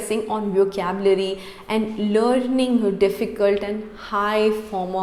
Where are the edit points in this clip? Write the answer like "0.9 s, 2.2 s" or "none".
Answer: none